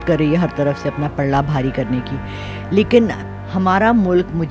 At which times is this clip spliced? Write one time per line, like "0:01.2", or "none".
0:03.2